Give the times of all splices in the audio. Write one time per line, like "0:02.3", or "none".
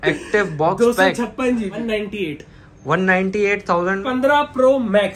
0:01.8
0:04.0

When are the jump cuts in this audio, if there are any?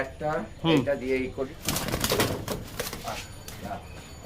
0:01.5

